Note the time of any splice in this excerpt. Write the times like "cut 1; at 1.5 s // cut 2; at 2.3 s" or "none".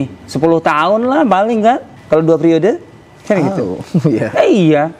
cut 1; at 1.9 s